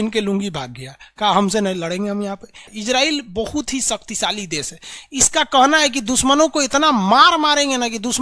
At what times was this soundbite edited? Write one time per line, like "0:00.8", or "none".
0:02.7